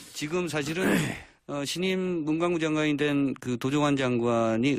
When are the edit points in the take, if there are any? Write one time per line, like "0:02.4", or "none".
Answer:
none